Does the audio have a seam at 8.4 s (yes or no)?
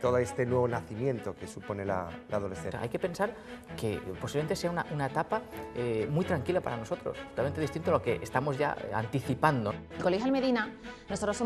no